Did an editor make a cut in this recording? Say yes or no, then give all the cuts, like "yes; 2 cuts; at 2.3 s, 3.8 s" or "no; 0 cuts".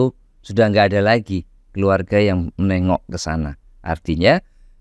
no; 0 cuts